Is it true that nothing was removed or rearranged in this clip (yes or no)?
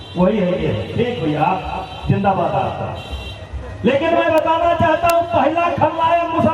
no